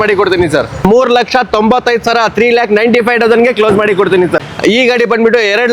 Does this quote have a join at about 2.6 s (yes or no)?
no